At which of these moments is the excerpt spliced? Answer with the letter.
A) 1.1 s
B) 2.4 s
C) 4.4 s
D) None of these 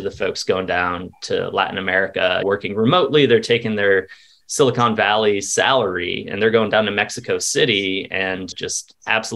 B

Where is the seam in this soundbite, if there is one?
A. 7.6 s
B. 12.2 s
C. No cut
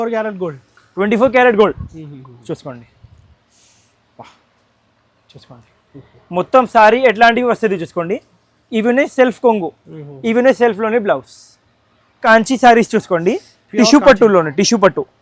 B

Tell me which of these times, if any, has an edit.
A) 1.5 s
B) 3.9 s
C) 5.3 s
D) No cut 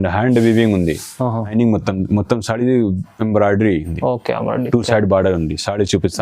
A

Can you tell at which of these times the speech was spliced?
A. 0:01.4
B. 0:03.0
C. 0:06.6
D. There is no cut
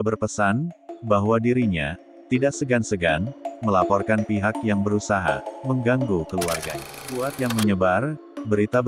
C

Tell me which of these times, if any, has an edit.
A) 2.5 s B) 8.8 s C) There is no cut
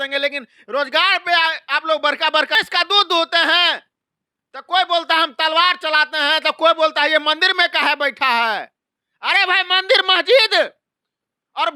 A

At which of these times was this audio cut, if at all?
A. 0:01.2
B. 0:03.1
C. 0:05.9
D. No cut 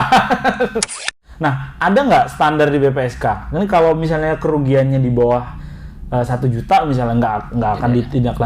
A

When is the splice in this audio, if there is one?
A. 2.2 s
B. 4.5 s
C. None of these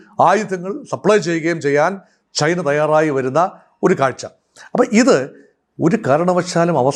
C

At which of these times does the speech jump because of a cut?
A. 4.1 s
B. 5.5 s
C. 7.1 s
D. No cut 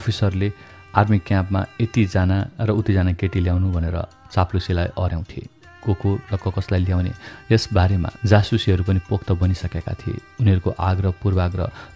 D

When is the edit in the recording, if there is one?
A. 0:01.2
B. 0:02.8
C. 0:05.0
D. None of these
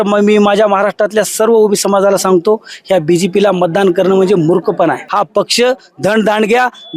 C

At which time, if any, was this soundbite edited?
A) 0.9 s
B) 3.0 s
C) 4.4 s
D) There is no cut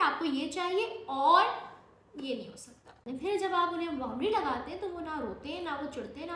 B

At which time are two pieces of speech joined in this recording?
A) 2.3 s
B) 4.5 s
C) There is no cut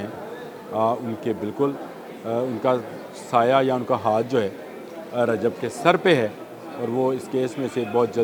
C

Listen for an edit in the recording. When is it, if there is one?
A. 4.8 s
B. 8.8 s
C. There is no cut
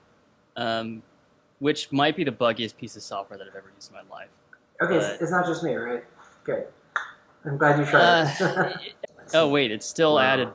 B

